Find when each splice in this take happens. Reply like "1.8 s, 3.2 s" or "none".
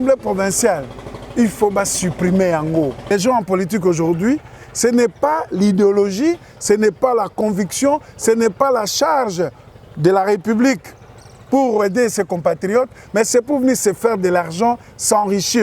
3.0 s

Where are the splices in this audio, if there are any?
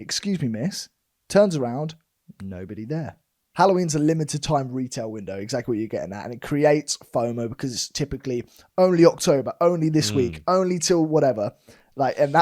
3.4 s

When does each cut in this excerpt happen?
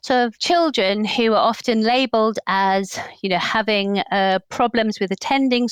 none

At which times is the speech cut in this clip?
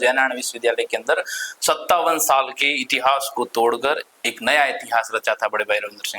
none

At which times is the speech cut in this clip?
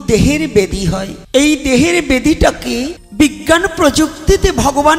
1.1 s, 3.0 s

